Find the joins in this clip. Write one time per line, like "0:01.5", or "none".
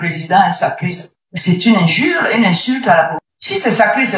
0:03.2